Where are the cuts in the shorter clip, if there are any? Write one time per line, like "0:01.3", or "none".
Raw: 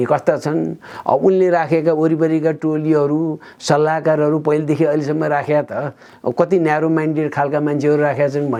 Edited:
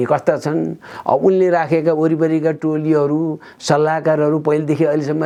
none